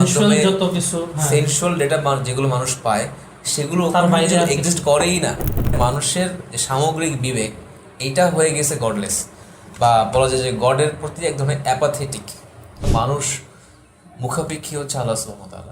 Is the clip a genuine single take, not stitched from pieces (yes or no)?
no